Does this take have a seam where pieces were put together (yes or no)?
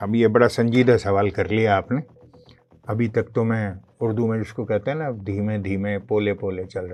no